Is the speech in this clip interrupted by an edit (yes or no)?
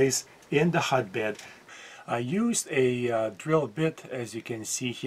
yes